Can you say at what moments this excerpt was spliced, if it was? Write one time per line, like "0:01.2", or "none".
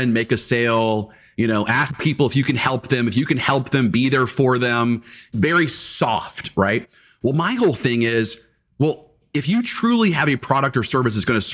0:05.3
0:09.3

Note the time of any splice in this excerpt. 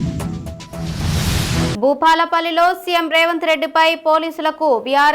none

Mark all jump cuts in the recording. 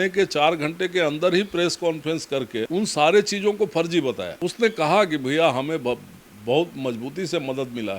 none

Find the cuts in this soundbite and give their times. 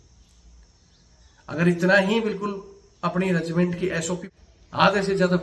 0:04.2

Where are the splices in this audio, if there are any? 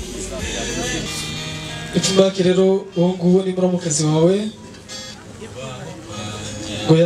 0:01.0

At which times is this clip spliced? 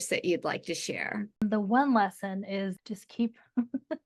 0:01.4
0:02.8

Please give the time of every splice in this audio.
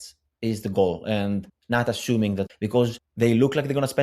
0:01.5
0:02.5

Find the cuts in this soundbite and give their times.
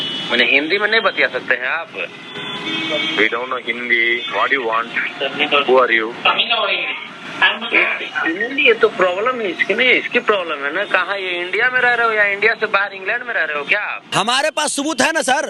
0:14.0

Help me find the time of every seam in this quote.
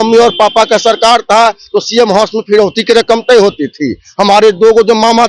none

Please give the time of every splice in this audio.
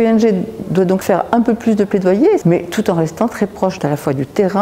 0:01.0
0:02.4
0:03.8

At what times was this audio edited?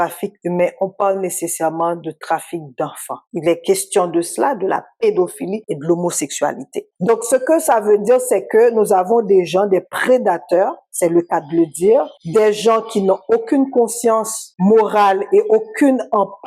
0:03.3
0:06.8

